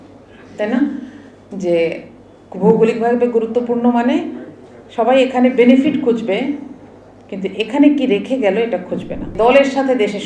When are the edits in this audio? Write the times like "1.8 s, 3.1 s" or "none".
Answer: 9.3 s